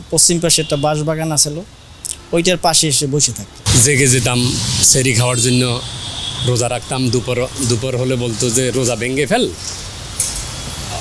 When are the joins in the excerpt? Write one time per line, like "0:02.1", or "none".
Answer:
0:03.6